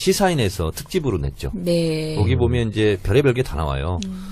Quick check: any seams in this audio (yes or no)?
yes